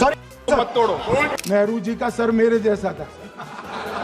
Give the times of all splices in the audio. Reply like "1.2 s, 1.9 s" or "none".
1.3 s